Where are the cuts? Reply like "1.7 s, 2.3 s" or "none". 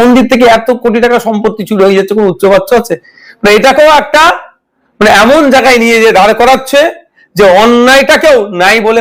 none